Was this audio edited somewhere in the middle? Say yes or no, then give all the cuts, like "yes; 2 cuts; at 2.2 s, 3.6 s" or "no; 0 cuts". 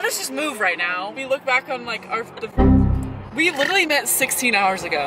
yes; 1 cut; at 1.2 s